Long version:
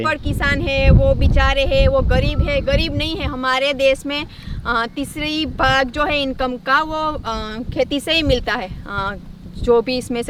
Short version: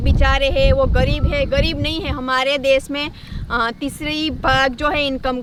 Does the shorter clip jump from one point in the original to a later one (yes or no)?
no